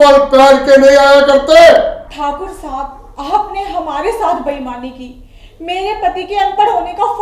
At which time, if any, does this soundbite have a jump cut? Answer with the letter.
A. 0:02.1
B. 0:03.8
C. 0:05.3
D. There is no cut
A